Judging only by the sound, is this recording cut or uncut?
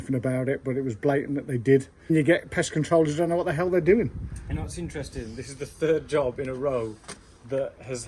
cut